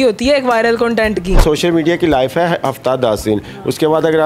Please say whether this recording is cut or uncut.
cut